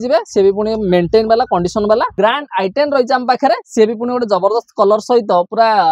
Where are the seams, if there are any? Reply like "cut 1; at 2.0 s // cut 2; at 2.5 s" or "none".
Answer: cut 1; at 2.1 s